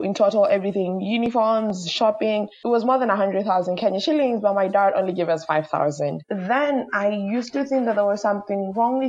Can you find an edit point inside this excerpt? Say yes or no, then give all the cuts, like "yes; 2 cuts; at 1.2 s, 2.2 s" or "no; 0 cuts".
yes; 2 cuts; at 2.5 s, 6.2 s